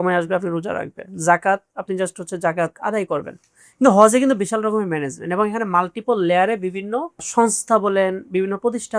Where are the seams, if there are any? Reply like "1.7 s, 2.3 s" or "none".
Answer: none